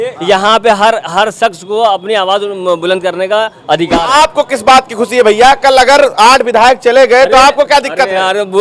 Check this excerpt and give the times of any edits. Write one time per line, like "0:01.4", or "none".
0:04.0